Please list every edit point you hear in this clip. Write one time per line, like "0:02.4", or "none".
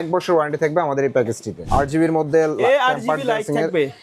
0:01.6